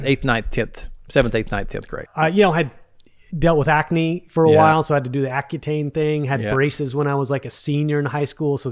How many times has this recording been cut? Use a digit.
1